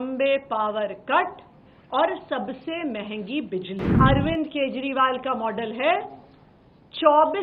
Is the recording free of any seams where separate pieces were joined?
no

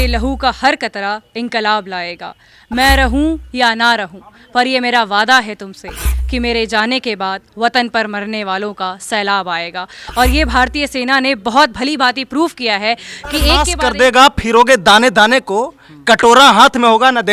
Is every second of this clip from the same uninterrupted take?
no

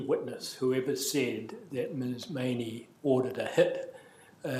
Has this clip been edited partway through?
no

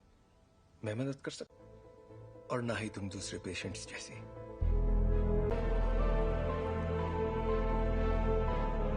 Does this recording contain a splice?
yes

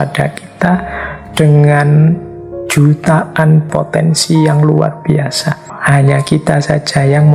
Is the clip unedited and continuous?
no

